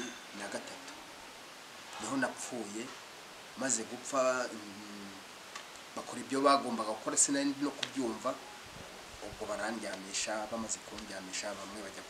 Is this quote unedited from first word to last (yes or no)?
yes